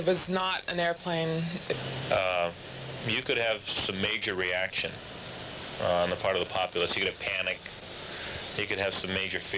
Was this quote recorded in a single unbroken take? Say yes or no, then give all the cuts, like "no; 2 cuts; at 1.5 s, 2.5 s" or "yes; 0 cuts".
no; 1 cut; at 6.6 s